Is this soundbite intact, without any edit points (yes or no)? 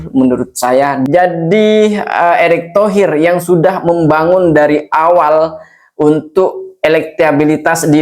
no